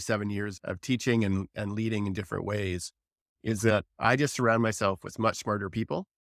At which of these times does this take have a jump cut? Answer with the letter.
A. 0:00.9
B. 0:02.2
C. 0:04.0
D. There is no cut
A